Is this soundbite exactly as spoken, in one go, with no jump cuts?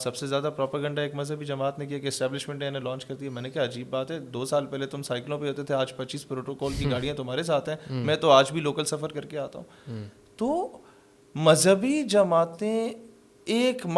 yes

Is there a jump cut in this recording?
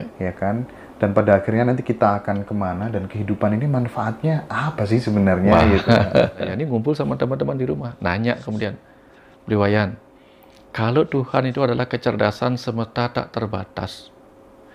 yes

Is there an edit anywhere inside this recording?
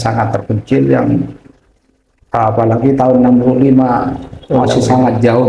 no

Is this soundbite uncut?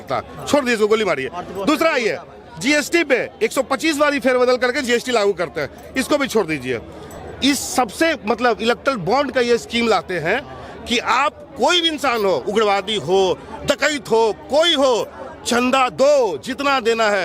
yes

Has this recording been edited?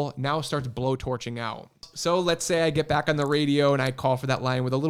yes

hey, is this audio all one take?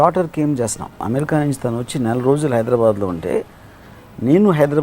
no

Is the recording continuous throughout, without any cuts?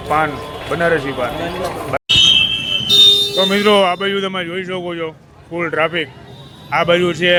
yes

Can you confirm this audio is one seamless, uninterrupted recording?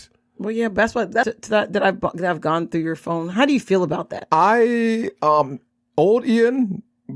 no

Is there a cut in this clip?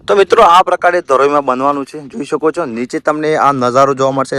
no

